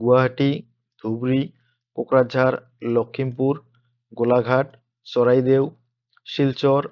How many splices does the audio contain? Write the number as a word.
zero